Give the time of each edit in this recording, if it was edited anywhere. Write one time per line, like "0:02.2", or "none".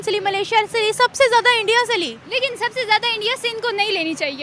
none